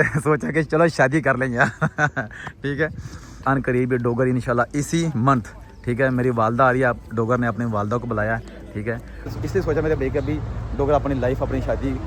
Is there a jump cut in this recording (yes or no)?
yes